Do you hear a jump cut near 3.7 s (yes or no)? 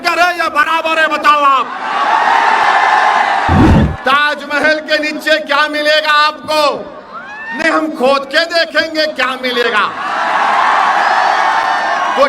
yes